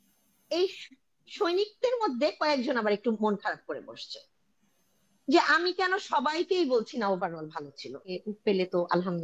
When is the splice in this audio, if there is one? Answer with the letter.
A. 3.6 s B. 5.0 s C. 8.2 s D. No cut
C